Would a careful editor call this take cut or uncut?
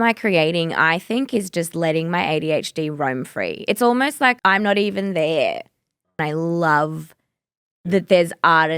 cut